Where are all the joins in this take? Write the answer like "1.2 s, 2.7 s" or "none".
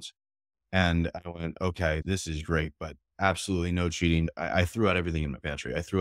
2.0 s, 4.3 s